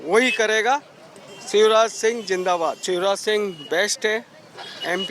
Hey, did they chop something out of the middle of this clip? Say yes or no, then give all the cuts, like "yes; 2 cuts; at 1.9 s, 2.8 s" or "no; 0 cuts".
yes; 1 cut; at 2.8 s